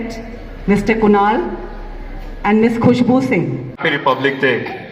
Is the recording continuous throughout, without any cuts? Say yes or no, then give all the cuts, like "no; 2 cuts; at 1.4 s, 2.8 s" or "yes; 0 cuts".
no; 1 cut; at 3.9 s